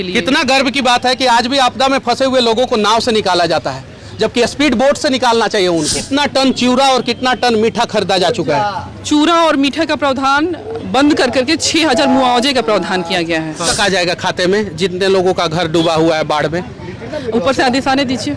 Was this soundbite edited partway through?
yes; 2 cuts; at 6.0 s, 13.7 s

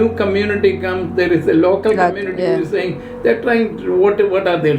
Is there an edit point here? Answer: no; 0 cuts

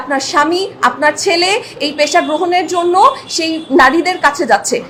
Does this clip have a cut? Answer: no; 0 cuts

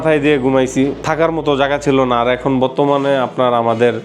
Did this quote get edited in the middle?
yes; 1 cut; at 1.0 s

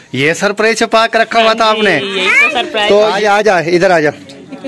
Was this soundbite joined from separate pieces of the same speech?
yes; 1 cut; at 3.2 s

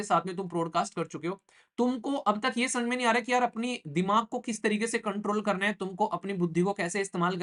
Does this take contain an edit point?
no; 0 cuts

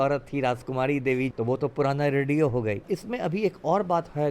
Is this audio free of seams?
no; 2 cuts; at 1.3 s, 2.8 s

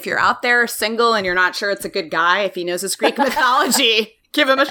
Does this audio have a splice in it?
no; 0 cuts

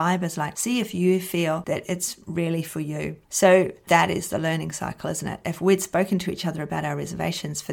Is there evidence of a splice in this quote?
yes; 2 cuts; at 3.2 s, 3.8 s

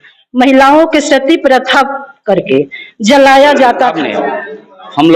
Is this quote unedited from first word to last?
no; 1 cut; at 4.0 s

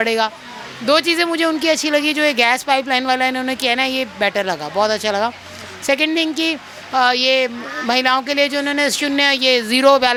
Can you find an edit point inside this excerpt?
no; 0 cuts

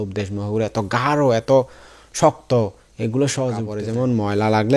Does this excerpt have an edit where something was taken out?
yes; 1 cut; at 3.8 s

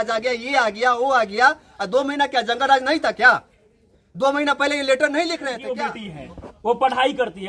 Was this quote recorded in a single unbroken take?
no; 1 cut; at 5.7 s

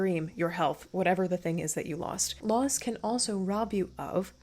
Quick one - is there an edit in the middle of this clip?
yes; 1 cut; at 2.2 s

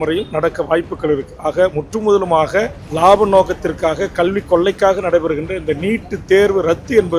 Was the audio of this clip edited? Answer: yes; 1 cut; at 2.8 s

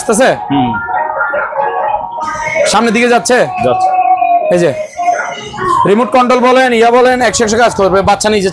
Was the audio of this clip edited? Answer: no; 0 cuts

